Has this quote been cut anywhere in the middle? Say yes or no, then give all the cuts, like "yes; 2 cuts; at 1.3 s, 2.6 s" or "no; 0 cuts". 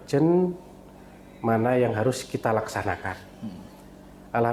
no; 0 cuts